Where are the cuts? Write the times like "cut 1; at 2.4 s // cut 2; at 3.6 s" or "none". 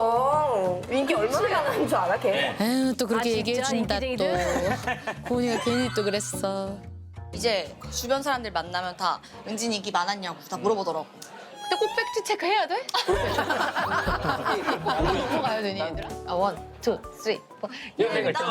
cut 1; at 15.9 s